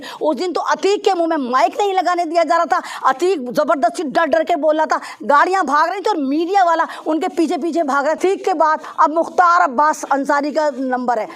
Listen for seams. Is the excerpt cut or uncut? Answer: cut